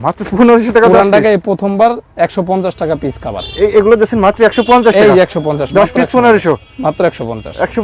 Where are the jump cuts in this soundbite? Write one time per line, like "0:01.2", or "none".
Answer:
none